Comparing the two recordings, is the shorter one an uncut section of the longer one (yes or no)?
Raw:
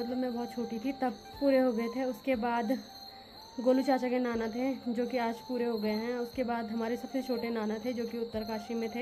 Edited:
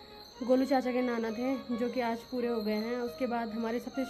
yes